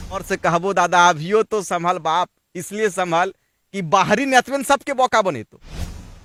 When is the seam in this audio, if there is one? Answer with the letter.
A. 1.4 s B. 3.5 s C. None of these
C